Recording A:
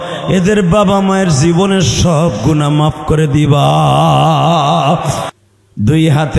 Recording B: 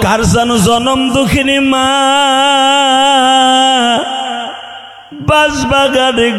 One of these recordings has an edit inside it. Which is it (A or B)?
A